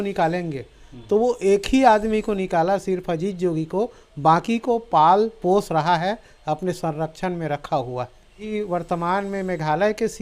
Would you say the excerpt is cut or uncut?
cut